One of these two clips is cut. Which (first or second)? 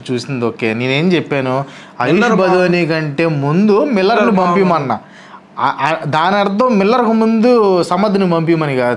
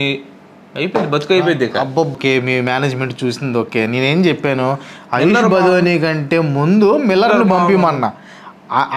second